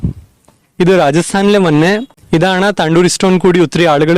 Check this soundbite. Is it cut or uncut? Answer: cut